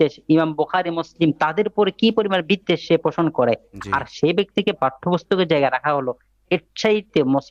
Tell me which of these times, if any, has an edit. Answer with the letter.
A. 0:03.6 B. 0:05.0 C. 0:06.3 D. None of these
D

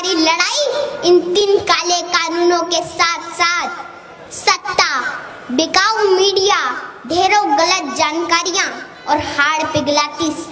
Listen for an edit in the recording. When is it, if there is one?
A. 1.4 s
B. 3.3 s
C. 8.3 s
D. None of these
A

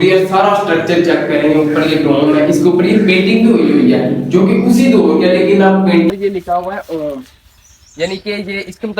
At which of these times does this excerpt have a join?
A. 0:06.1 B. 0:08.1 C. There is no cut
A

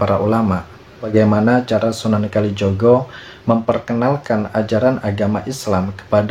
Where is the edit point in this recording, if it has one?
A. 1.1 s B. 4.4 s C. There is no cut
A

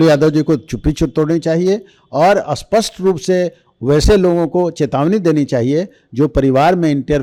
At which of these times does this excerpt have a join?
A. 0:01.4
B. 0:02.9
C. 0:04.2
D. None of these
D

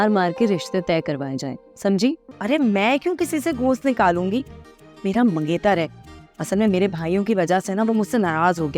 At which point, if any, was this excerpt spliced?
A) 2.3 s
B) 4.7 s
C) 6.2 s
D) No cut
A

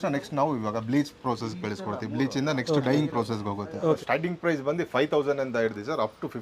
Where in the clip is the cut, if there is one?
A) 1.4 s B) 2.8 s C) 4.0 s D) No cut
C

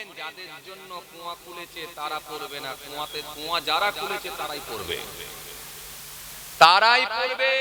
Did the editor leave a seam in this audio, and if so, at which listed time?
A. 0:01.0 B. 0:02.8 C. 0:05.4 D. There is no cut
D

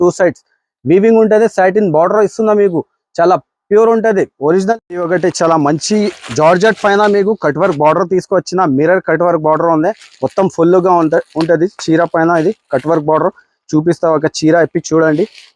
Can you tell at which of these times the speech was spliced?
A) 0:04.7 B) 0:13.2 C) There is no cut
A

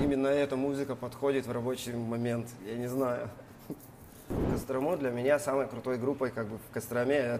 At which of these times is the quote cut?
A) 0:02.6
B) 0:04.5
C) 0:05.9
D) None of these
B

